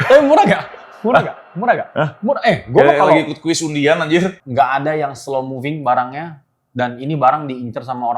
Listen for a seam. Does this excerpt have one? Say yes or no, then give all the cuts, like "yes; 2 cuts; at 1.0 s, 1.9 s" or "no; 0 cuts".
yes; 1 cut; at 4.3 s